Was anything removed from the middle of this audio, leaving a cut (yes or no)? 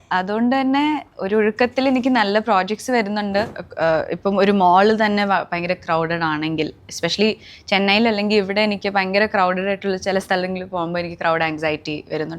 yes